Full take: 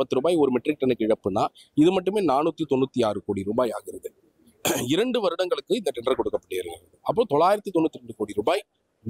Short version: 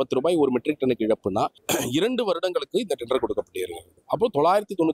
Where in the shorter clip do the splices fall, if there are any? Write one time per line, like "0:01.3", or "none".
0:01.6